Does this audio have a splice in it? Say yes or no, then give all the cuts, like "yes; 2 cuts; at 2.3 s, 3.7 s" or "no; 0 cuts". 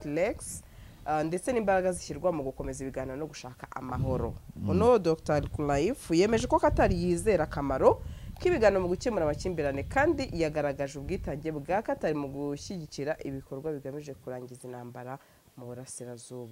no; 0 cuts